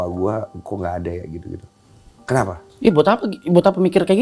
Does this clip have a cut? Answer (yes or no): no